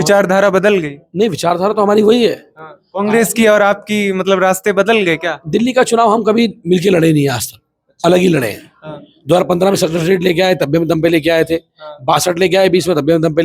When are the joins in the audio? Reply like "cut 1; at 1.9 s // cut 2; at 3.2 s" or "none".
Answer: none